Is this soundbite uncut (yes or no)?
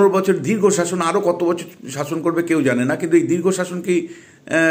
yes